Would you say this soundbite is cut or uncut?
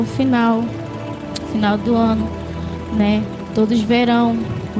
uncut